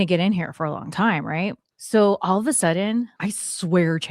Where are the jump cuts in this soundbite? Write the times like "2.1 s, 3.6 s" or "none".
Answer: 1.7 s, 3.1 s